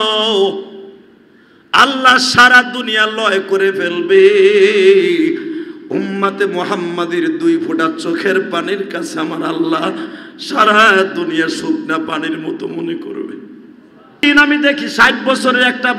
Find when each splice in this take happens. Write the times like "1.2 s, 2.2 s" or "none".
14.2 s